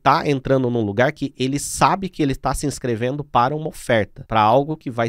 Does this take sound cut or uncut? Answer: cut